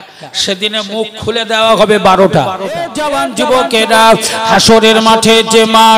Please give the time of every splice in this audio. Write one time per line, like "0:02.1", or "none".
0:03.0